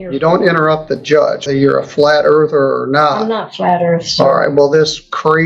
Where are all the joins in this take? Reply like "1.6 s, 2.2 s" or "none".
1.5 s